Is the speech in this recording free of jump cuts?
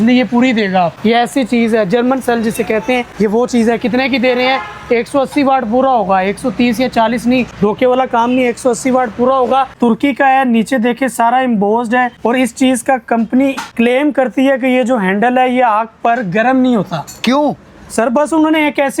no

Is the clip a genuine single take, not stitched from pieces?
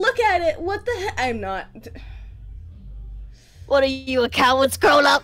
yes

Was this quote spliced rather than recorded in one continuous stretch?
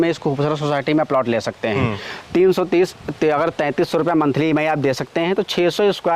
no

